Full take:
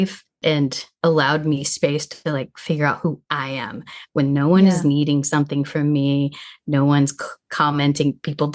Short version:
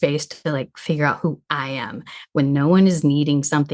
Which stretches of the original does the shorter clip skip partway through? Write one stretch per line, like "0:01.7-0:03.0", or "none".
none